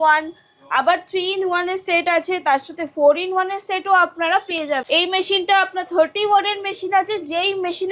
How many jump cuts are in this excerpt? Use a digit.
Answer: 1